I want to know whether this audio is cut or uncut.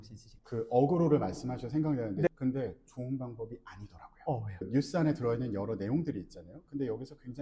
cut